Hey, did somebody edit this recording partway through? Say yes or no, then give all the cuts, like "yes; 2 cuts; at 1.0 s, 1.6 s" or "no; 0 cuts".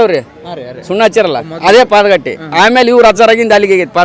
no; 0 cuts